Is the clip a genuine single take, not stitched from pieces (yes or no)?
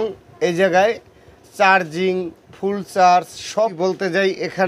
no